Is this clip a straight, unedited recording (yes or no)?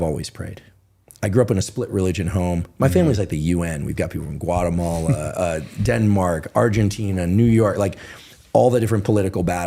yes